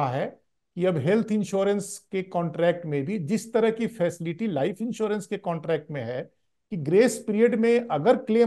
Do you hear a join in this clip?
no; 0 cuts

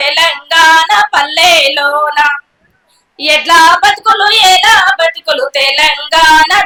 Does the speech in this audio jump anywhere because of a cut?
no; 0 cuts

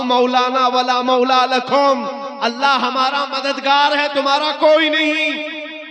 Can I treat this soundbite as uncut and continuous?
yes; 0 cuts

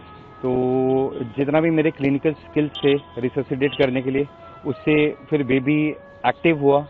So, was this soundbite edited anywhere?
no; 0 cuts

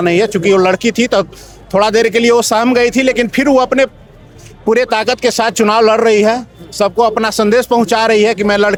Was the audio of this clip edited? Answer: no; 0 cuts

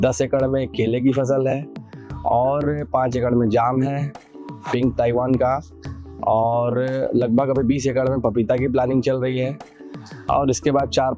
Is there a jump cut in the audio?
no; 0 cuts

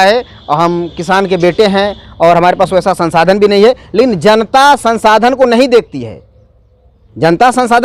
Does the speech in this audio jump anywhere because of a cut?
no; 0 cuts

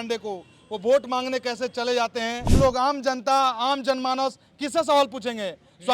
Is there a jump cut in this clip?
yes; 1 cut; at 2.4 s

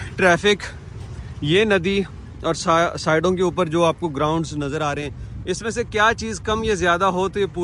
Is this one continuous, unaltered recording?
yes; 0 cuts

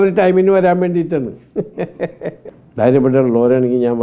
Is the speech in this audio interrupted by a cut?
yes; 1 cut; at 2.5 s

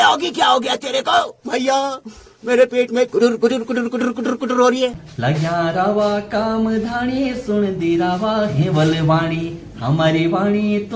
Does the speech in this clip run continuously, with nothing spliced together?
no; 1 cut; at 5.1 s

